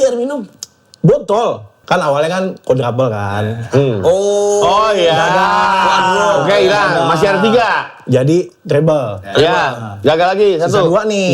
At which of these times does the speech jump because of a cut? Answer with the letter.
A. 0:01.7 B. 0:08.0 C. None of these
A